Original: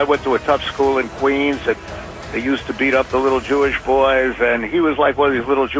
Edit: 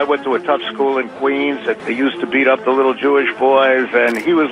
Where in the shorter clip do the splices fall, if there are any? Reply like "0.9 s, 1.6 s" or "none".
1.8 s